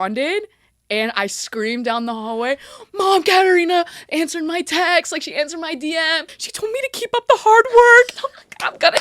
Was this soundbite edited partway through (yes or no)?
yes